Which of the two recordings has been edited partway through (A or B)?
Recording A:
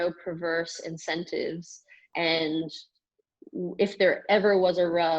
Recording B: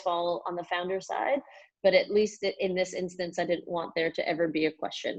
A